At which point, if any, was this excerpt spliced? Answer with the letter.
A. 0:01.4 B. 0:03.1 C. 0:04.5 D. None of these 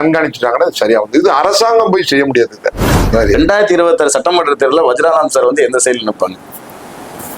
B